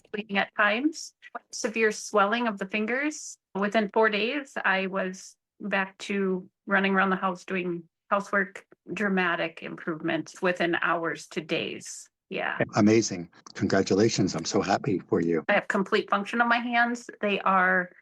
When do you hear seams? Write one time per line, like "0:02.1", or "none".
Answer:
0:03.4
0:10.4
0:15.5